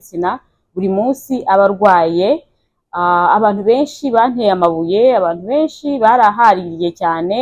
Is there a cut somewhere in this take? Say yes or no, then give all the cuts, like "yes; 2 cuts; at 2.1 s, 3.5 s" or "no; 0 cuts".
no; 0 cuts